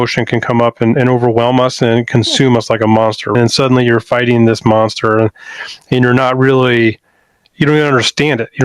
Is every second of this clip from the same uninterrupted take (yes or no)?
no